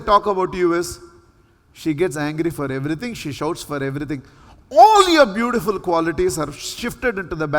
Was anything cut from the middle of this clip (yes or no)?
no